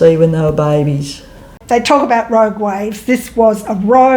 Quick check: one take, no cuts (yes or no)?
no